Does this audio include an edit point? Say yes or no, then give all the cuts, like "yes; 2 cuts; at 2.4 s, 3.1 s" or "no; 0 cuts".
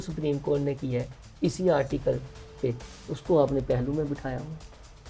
no; 0 cuts